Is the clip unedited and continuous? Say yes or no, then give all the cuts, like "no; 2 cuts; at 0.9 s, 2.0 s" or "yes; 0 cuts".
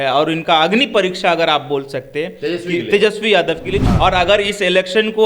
no; 1 cut; at 3.9 s